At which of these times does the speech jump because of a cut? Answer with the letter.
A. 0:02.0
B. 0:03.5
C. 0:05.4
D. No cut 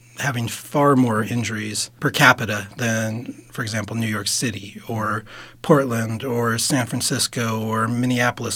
A